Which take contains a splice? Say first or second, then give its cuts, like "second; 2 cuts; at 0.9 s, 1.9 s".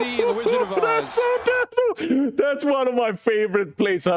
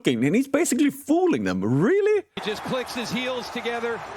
second; 1 cut; at 2.3 s